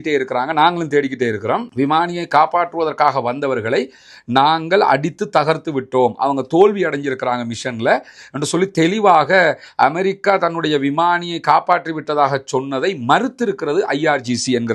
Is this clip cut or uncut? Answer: uncut